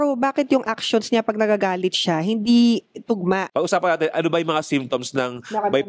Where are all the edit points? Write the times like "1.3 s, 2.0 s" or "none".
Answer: 3.5 s